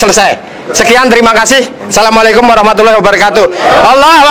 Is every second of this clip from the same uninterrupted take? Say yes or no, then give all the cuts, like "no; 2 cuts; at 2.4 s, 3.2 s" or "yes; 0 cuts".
yes; 0 cuts